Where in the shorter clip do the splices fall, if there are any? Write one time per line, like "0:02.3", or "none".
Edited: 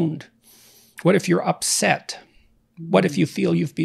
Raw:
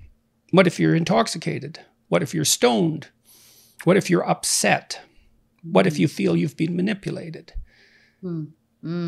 none